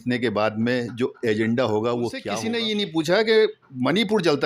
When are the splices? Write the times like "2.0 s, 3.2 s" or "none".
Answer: 2.3 s